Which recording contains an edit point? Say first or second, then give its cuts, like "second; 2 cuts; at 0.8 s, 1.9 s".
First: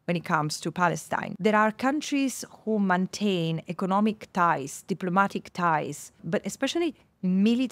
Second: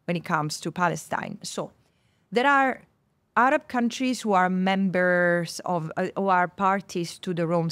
first; 2 cuts; at 1.3 s, 6.2 s